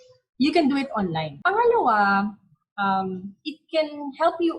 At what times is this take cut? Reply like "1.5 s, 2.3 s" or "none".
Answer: 1.3 s